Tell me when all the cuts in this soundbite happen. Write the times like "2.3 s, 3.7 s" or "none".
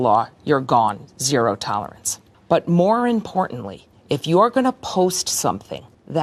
none